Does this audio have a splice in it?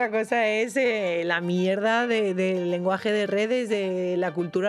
no; 0 cuts

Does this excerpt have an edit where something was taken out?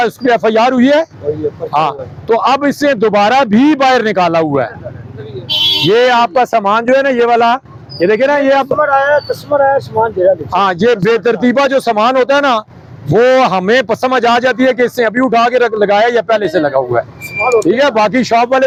no; 0 cuts

